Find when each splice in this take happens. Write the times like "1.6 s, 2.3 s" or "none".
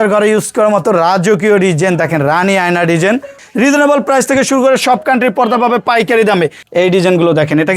3.4 s, 6.6 s